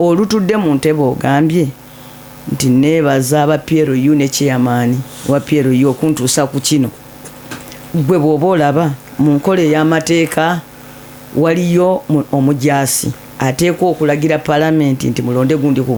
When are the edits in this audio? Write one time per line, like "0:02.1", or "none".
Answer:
none